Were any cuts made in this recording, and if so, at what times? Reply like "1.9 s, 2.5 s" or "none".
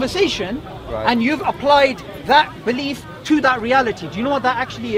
none